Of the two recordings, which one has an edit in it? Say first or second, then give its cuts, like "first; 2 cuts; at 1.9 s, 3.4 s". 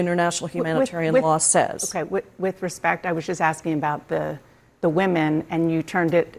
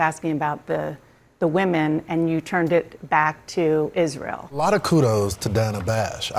second; 1 cut; at 4.6 s